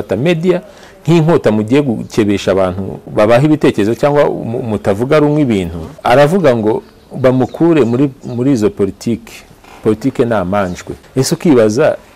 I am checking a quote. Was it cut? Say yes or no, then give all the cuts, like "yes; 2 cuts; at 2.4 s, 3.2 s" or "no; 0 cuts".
yes; 3 cuts; at 3.0 s, 5.8 s, 11.0 s